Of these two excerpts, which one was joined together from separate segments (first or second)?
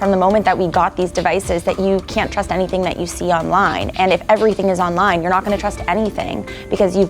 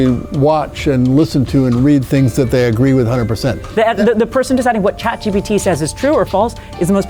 second